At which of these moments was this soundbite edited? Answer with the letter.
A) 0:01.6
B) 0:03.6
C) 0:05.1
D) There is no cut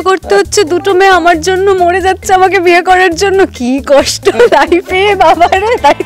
D